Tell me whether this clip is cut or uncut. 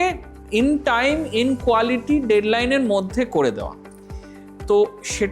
uncut